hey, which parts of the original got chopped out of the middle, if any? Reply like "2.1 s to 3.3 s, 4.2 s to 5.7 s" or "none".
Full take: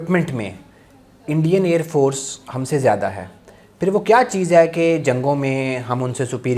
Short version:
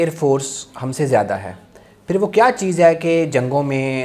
none